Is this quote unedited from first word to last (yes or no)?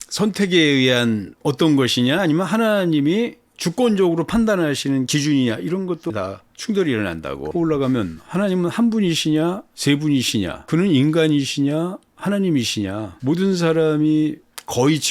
no